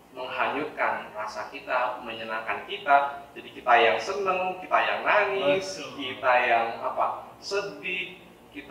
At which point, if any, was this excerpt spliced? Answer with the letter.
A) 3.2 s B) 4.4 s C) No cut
C